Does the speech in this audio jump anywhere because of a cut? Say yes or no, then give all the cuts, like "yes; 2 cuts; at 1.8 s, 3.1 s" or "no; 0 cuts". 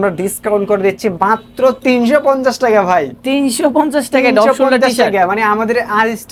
no; 0 cuts